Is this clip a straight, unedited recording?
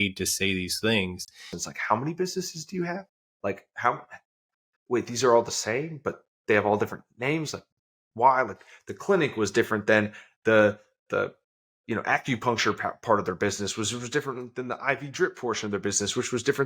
no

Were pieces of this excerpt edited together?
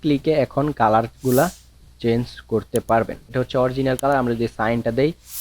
yes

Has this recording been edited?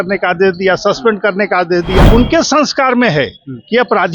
yes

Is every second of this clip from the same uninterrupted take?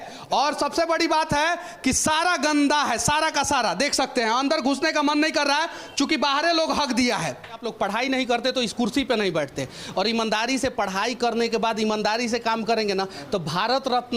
no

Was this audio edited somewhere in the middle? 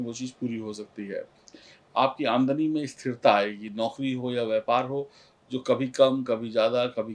no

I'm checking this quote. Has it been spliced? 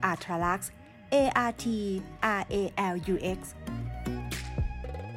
yes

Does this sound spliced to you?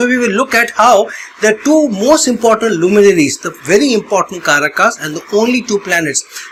no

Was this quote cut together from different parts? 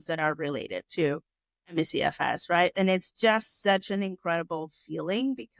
yes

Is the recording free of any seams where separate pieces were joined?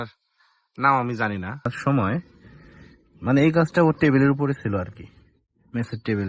no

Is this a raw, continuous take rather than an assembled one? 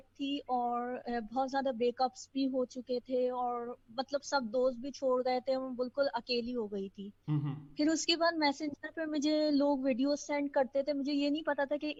yes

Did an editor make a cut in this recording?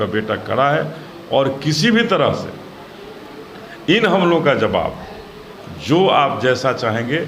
no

